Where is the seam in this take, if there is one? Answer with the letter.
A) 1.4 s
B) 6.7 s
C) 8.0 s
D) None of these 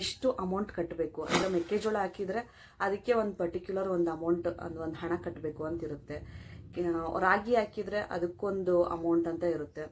A